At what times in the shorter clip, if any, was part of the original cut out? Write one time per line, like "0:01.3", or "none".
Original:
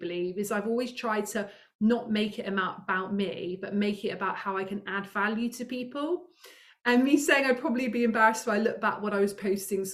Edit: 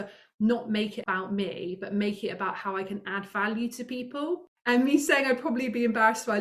0:01.0
0:04.5